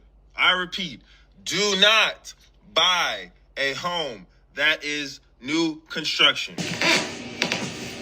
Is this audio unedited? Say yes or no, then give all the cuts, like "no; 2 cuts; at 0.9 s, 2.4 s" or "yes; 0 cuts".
no; 1 cut; at 6.5 s